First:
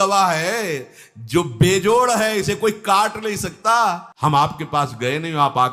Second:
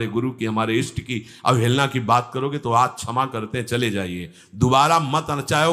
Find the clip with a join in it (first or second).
first